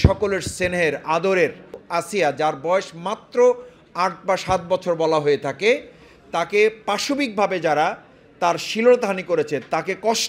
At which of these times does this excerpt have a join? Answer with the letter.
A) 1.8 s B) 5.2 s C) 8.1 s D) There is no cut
A